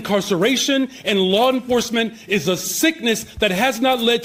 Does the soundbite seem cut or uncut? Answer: uncut